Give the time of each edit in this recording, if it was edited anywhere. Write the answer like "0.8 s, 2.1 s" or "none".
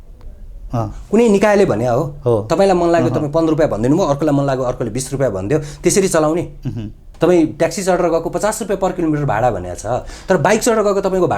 7.0 s